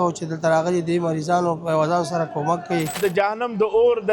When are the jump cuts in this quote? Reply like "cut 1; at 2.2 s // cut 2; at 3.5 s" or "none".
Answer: cut 1; at 3.0 s

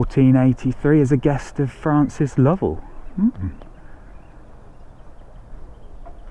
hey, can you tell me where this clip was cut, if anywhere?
none

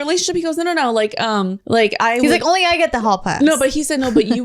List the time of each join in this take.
cut 1; at 1.6 s

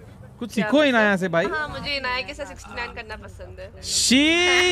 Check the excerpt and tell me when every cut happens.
cut 1; at 1.6 s

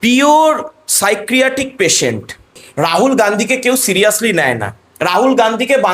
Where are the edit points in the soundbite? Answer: cut 1; at 2.6 s

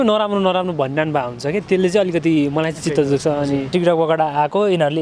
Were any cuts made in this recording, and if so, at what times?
cut 1; at 3.7 s

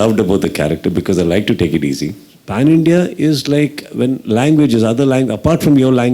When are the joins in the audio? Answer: cut 1; at 2.4 s

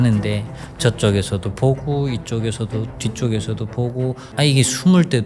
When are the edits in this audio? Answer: cut 1; at 4.2 s

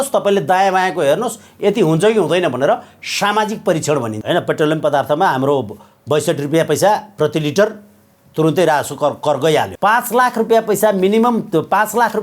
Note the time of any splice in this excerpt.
cut 1; at 4.2 s // cut 2; at 9.7 s

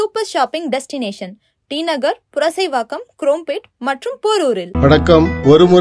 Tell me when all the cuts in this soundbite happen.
cut 1; at 4.7 s

